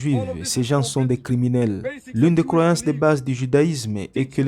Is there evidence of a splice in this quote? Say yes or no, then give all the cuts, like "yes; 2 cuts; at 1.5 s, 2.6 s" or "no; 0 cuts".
yes; 1 cut; at 2.0 s